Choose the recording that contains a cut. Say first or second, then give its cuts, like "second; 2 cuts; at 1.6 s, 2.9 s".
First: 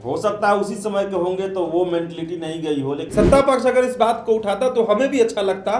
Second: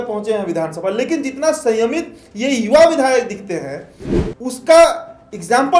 first; 1 cut; at 3.0 s